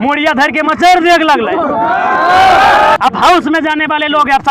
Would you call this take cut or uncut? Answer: cut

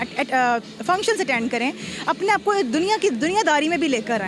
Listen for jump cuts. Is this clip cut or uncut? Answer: uncut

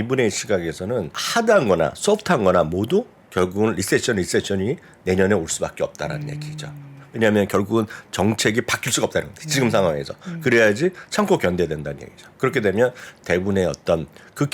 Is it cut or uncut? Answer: cut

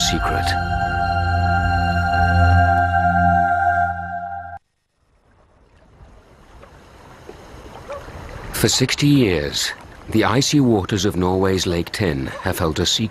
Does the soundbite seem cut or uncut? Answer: cut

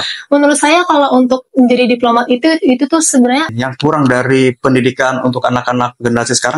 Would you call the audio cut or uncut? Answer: cut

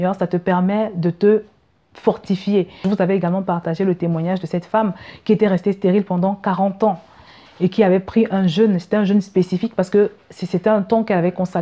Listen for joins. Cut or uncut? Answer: cut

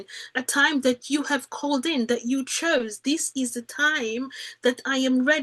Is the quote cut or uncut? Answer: uncut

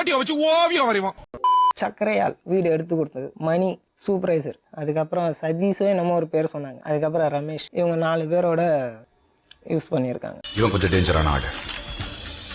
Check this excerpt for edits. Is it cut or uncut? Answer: cut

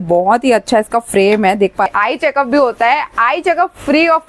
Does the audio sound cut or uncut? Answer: cut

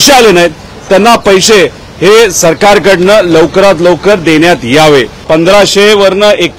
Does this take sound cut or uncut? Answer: cut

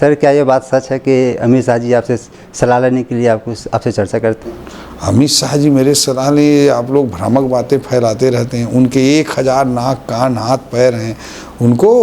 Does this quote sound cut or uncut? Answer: uncut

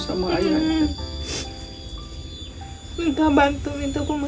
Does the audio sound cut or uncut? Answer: uncut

